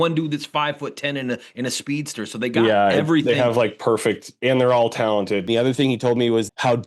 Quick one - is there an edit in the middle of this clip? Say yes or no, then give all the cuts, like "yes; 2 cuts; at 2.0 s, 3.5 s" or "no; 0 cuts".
yes; 1 cut; at 5.5 s